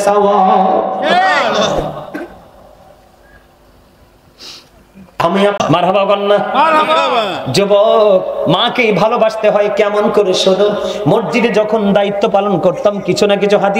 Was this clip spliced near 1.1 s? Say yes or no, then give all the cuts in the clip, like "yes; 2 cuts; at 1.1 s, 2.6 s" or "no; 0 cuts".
no; 1 cut; at 5.6 s